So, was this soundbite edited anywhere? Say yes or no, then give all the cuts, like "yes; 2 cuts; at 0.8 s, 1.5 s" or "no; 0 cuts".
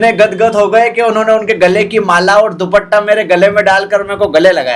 no; 0 cuts